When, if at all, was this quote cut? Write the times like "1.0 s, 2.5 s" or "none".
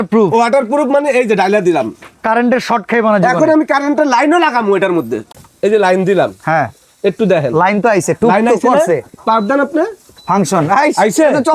5.2 s